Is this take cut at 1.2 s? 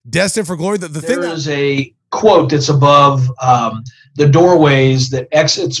yes; 1 cut; at 1.2 s

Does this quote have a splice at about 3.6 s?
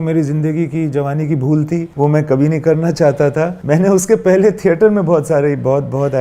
yes; 2 cuts; at 1.9 s, 3.6 s

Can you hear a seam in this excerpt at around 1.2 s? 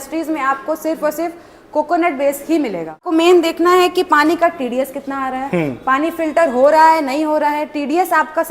no; 1 cut; at 3.1 s

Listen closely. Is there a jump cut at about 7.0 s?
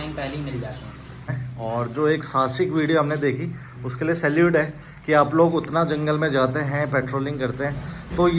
no; 1 cut; at 1.4 s

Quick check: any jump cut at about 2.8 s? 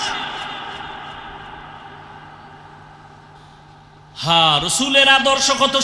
no; 1 cut; at 4.1 s

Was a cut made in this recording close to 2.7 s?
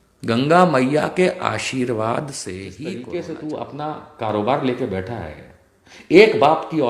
yes; 1 cut; at 2.7 s

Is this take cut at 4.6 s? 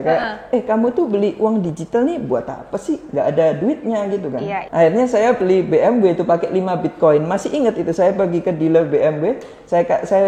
yes; 1 cut; at 4.6 s

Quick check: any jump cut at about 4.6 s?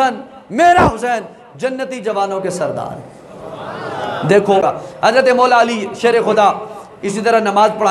yes; 1 cut; at 4.6 s

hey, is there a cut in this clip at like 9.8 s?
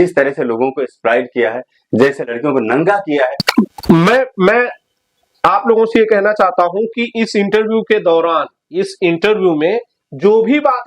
no; 1 cut; at 3.5 s

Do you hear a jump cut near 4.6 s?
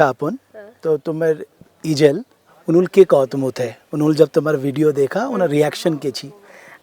no; 2 cuts; at 1.7 s, 2.5 s

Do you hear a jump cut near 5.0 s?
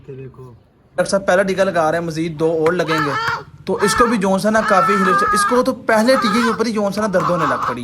no; 1 cut; at 1.0 s

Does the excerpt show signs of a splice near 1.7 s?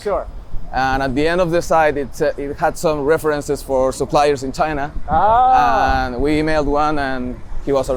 no; 0 cuts

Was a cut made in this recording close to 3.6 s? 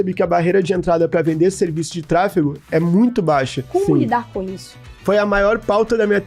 yes; 1 cut; at 3.6 s

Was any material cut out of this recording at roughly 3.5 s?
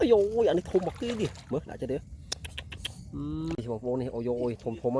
yes; 1 cut; at 3.5 s

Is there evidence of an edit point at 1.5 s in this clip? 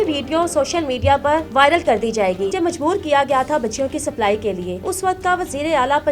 yes; 3 cuts; at 1.5 s, 2.5 s, 4.9 s

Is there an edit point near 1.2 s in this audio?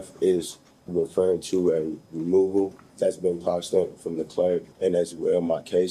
no; 2 cuts; at 2.8 s, 4.7 s

